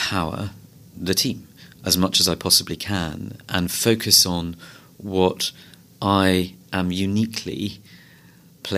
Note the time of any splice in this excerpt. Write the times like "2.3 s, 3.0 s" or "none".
none

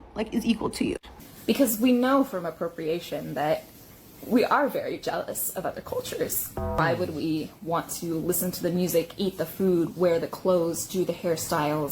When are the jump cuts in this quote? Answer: 1.0 s, 6.8 s

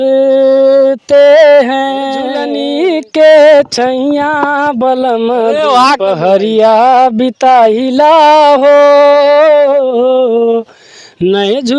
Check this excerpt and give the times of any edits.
2.5 s

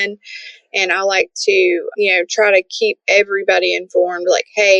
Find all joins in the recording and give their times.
1.9 s

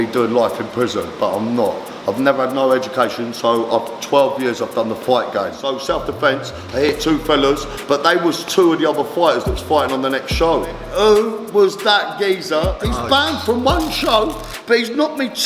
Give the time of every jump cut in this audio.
5.6 s, 10.8 s, 12.8 s

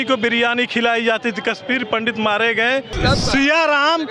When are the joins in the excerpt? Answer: 2.9 s

